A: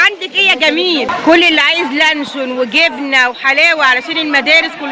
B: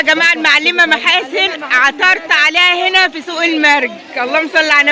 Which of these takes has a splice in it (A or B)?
A